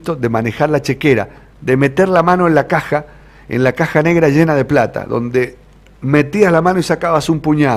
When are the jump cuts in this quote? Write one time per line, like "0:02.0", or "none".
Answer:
none